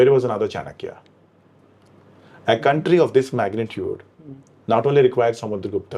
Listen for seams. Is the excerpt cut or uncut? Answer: uncut